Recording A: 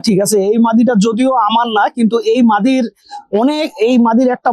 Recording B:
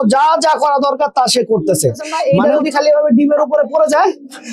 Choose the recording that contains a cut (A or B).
B